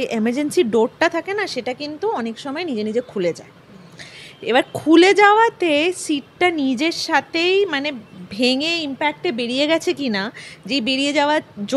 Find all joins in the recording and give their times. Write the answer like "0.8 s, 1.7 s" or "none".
none